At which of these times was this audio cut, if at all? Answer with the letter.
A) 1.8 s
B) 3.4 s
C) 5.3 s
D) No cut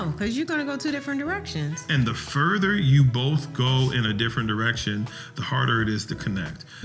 A